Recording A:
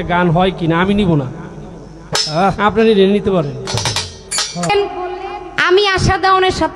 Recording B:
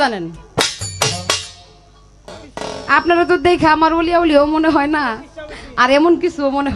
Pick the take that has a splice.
A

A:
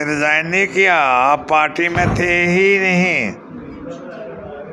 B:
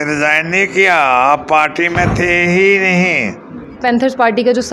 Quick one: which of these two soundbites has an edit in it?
B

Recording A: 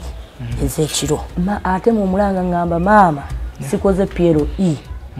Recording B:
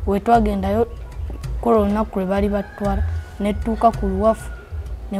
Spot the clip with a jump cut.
A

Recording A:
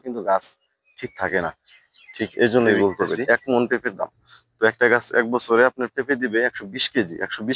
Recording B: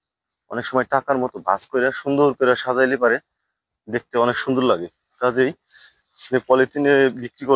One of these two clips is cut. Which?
A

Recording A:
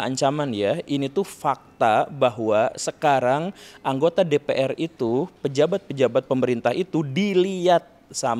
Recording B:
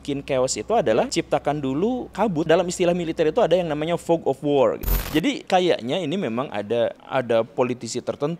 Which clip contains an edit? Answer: B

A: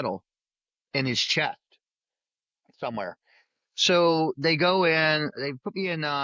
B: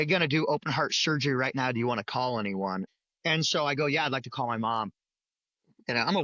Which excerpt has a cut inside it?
B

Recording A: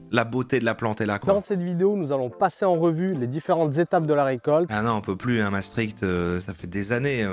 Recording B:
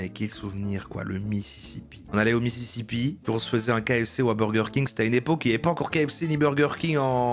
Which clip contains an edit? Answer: A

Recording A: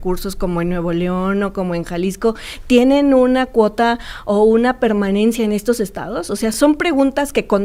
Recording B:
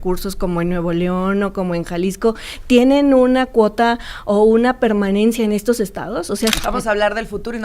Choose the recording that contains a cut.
B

